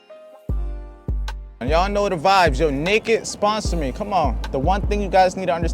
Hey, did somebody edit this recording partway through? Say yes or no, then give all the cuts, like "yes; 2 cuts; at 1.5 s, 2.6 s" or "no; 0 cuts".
yes; 2 cuts; at 1.6 s, 4.4 s